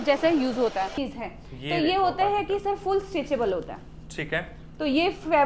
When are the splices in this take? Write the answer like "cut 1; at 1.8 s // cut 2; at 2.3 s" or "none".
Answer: cut 1; at 1.0 s